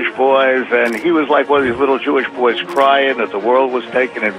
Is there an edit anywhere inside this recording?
no; 0 cuts

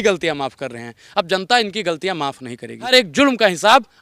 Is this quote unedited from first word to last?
no; 1 cut; at 2.9 s

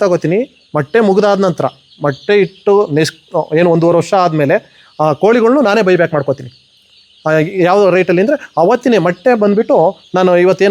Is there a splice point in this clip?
no; 0 cuts

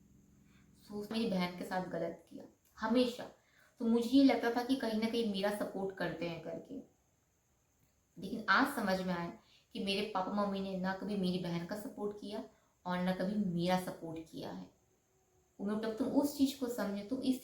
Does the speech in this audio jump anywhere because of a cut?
yes; 2 cuts; at 1.1 s, 15.8 s

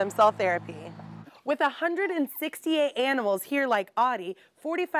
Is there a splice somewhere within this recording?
yes; 1 cut; at 1.1 s

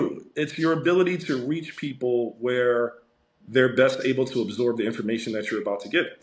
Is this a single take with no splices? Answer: yes; 0 cuts

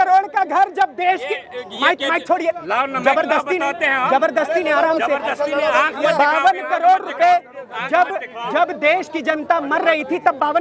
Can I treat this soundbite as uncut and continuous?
yes; 0 cuts

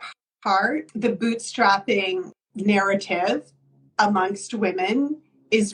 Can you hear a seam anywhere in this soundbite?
yes; 2 cuts; at 0.9 s, 2.3 s

